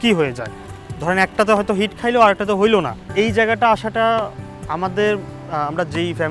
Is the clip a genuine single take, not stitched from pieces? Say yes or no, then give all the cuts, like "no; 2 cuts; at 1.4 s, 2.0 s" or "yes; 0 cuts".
no; 1 cut; at 3.0 s